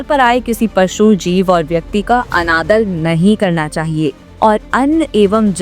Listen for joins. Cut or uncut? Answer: cut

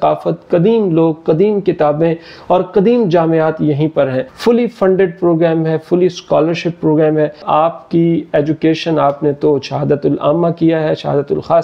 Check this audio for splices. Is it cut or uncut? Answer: cut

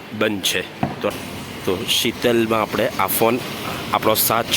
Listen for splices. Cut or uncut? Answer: cut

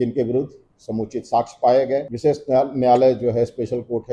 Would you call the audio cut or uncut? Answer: cut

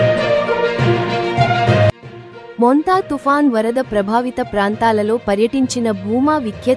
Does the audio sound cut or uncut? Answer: cut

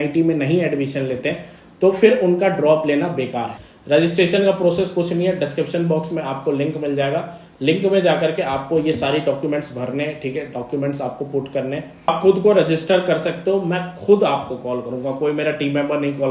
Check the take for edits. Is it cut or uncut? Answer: cut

